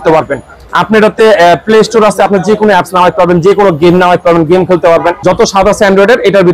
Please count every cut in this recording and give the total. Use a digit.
1